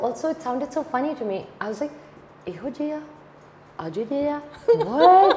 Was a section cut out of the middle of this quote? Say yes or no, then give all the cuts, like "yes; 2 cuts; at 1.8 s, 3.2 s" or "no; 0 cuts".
no; 0 cuts